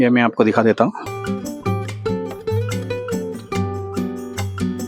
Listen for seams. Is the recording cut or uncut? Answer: cut